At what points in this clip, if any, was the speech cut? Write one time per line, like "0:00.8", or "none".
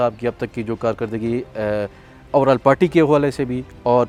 none